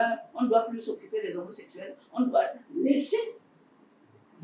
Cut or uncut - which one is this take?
uncut